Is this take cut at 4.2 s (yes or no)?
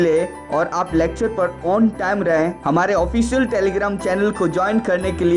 no